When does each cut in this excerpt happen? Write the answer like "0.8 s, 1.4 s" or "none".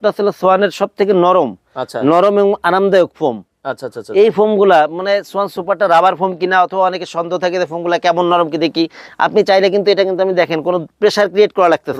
none